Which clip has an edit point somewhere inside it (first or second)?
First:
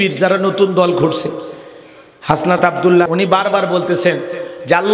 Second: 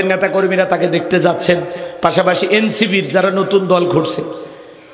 first